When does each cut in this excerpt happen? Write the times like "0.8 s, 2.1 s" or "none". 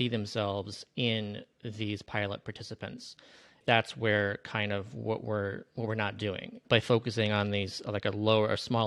3.6 s, 6.6 s